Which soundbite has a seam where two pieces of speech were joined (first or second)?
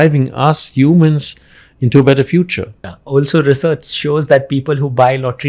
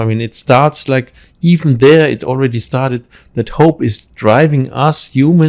first